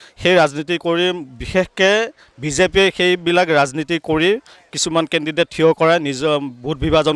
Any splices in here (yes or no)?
no